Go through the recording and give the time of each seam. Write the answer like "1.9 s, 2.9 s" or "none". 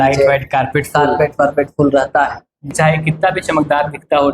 2.7 s